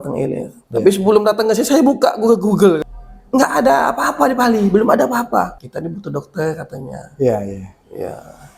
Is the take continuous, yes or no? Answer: no